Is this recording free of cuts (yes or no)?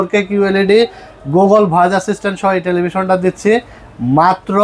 yes